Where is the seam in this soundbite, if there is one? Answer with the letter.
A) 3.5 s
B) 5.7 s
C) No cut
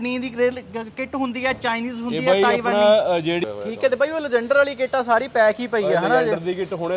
A